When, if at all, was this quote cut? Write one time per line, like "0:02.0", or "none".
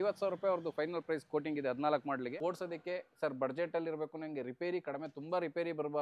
0:02.2